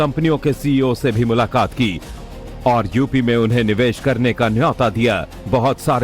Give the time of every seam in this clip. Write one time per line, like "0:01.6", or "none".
0:01.2